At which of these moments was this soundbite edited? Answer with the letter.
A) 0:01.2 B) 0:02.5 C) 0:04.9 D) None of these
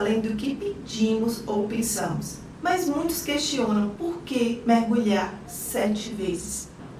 D